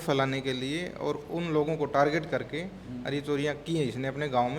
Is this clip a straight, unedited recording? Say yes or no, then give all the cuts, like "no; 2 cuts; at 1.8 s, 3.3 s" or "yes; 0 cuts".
yes; 0 cuts